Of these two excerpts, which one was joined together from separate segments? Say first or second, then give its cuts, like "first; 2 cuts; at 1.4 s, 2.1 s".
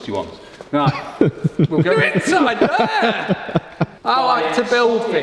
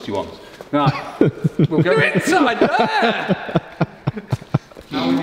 first; 1 cut; at 4.0 s